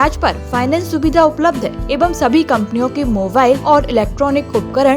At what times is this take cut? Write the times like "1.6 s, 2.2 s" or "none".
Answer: 1.8 s, 3.6 s